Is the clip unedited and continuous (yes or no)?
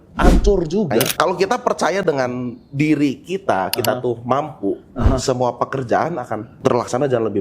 no